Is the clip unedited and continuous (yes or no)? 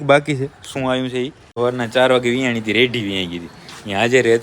no